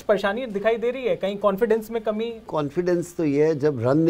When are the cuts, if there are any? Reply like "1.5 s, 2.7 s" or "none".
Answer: 2.5 s